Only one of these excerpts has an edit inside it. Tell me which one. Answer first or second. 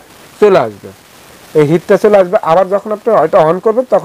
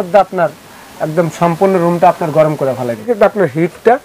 second